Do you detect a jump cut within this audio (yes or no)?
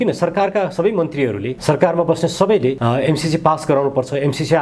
yes